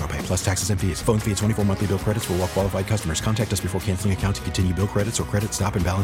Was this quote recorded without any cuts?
yes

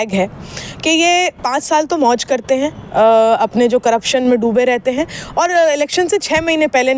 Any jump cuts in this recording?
no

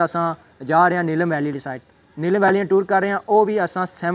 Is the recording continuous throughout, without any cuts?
yes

